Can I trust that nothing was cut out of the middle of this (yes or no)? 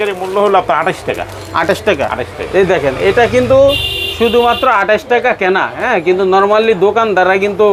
yes